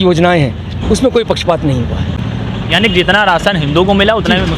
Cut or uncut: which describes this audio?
cut